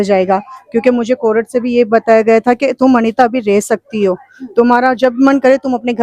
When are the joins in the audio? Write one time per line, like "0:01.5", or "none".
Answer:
none